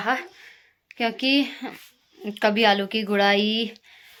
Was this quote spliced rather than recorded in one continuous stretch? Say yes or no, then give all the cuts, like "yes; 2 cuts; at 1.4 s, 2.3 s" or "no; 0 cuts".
no; 0 cuts